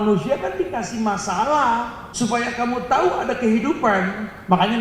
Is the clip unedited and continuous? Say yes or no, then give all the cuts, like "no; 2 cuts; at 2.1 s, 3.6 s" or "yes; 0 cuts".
no; 1 cut; at 2.0 s